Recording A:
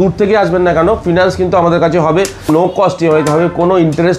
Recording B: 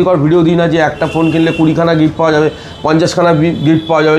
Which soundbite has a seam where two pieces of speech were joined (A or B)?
A